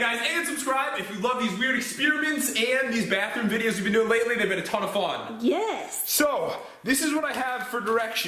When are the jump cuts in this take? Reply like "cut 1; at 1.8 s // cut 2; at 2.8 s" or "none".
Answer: none